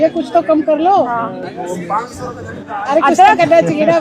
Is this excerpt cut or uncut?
uncut